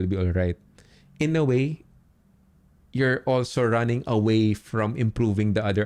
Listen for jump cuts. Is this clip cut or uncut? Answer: uncut